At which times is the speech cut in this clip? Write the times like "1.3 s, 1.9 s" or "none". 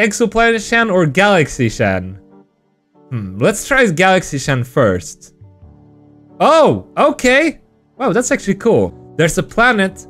9.0 s